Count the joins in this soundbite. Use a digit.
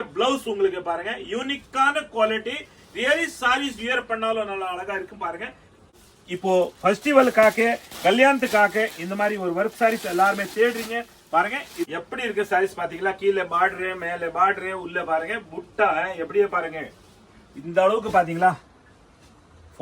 2